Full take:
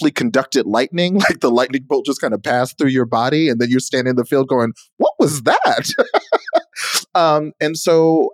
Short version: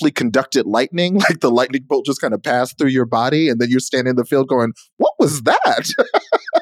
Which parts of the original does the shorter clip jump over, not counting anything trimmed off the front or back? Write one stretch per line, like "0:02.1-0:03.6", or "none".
none